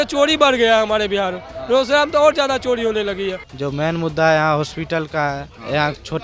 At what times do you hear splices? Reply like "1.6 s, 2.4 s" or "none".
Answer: 3.5 s